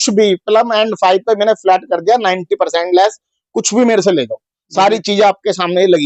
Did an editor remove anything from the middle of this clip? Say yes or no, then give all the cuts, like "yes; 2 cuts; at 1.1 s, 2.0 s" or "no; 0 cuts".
no; 0 cuts